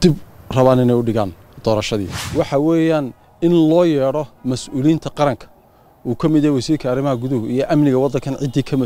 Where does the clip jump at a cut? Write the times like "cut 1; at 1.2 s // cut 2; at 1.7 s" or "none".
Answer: cut 1; at 2.2 s